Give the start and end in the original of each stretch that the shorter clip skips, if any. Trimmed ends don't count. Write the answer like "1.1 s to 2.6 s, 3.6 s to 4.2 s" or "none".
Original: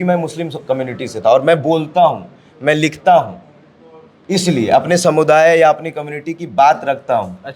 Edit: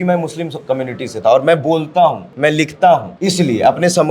2.3 s to 2.5 s, 3.3 s to 4.2 s